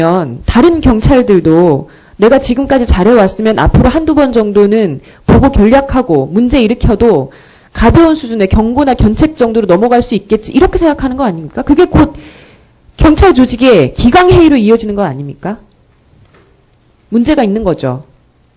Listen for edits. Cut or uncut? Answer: cut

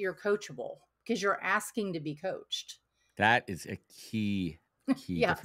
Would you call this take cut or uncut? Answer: uncut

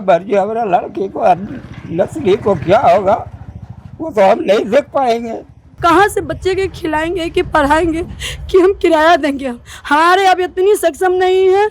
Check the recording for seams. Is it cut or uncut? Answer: cut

